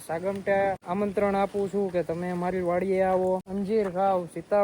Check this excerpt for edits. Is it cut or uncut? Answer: cut